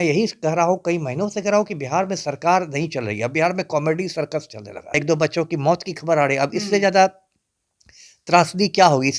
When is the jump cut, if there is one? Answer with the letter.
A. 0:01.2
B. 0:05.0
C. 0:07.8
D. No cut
B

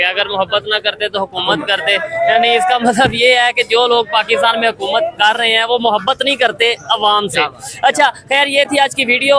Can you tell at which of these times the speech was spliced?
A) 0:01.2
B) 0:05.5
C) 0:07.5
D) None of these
D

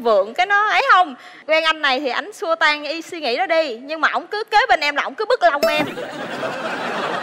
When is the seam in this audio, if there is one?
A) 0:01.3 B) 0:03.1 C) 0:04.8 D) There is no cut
A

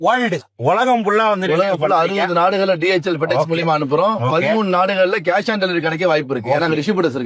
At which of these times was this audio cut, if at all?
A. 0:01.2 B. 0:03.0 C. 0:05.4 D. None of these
B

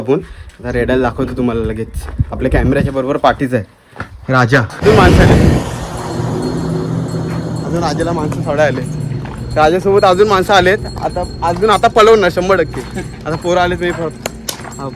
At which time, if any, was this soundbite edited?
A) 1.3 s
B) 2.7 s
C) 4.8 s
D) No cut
C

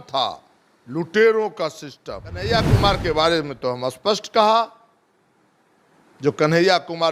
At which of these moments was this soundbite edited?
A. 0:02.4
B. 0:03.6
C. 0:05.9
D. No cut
A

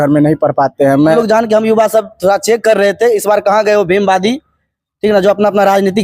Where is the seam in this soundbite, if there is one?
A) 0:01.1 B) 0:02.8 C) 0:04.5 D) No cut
A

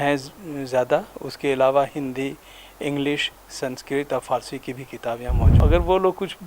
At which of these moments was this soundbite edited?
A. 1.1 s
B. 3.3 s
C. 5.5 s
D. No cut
C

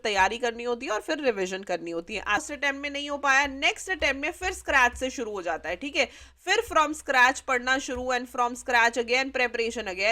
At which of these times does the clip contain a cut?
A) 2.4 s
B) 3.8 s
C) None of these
A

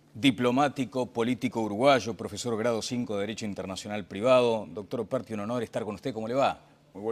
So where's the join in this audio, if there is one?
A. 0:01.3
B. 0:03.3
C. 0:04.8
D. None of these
D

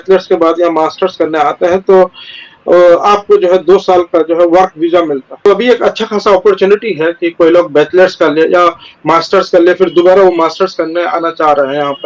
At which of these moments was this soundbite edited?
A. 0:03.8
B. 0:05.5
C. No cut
B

